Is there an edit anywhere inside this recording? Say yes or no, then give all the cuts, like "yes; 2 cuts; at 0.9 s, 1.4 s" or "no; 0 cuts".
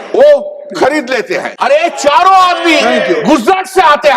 yes; 1 cut; at 1.5 s